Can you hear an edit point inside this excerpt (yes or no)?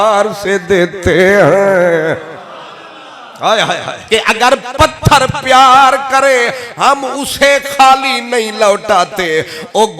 yes